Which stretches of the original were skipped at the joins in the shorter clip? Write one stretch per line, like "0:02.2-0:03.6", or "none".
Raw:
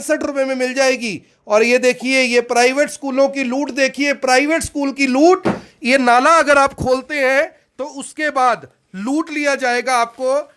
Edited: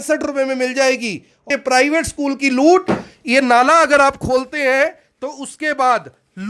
0:01.4-0:04.0